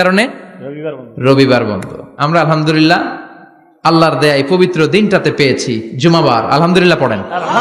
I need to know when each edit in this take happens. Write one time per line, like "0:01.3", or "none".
none